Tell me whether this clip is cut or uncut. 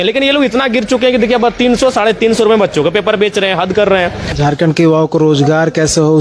cut